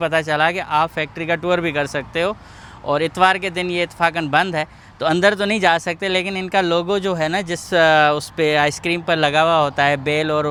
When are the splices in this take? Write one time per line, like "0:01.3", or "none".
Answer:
none